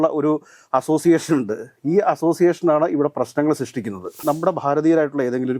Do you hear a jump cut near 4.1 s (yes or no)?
yes